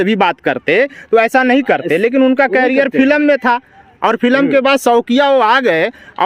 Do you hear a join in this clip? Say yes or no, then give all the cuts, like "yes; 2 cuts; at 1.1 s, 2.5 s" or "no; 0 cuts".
no; 0 cuts